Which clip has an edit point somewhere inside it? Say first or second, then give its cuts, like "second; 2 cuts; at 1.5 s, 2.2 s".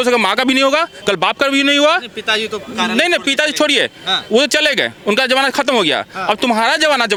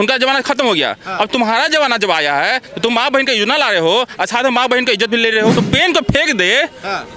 second; 1 cut; at 5.6 s